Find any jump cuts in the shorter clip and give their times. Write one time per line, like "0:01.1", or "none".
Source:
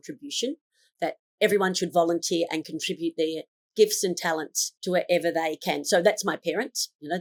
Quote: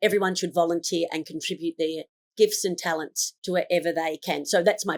none